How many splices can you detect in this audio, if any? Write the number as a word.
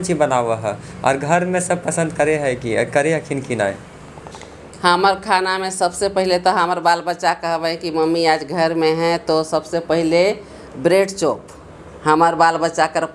zero